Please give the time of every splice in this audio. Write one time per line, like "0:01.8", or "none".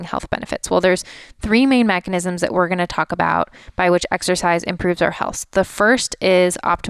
0:02.0